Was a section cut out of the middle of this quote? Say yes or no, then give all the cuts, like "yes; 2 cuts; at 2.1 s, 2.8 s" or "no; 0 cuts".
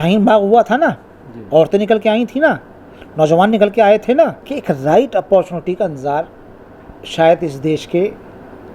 yes; 1 cut; at 4.5 s